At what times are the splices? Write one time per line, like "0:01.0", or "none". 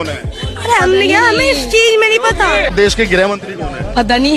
none